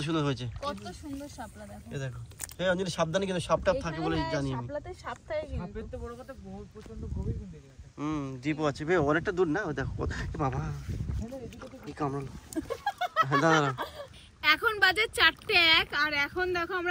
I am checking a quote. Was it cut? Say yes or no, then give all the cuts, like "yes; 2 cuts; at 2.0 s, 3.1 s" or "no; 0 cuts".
no; 0 cuts